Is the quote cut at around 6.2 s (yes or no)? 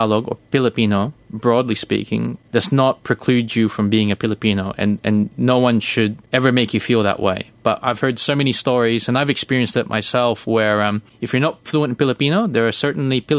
yes